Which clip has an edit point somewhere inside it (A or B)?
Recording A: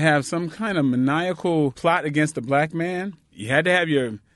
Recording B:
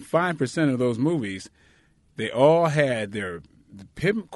A